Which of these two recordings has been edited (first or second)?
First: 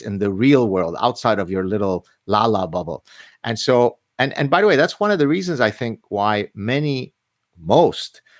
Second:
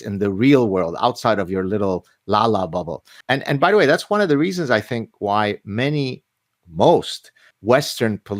second